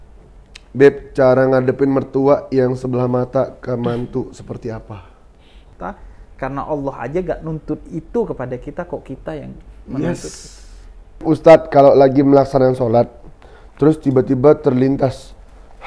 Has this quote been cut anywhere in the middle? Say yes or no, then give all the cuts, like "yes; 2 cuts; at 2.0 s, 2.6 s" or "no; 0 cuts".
yes; 2 cuts; at 5.6 s, 11.2 s